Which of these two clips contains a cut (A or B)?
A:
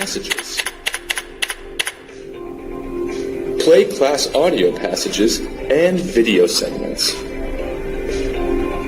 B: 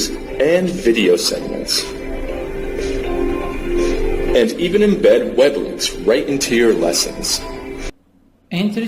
A